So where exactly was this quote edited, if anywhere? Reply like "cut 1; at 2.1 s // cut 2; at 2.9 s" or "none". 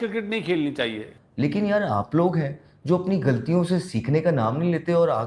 cut 1; at 1.2 s